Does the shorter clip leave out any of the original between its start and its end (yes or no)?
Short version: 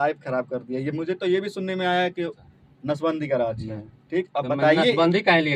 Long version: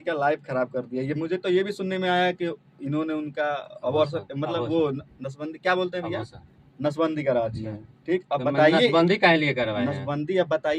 yes